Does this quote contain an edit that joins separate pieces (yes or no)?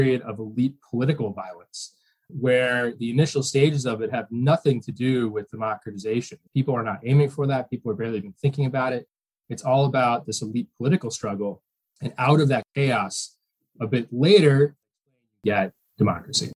yes